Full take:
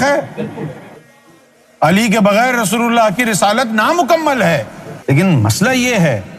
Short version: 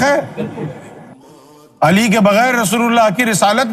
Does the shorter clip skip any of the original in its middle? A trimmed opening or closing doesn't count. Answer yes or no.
no